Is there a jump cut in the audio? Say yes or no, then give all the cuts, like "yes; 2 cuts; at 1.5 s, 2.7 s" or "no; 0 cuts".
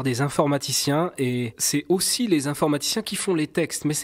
yes; 1 cut; at 1.6 s